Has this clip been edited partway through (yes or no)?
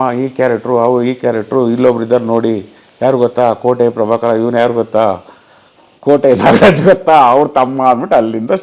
no